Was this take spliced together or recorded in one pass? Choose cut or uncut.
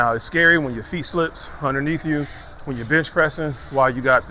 uncut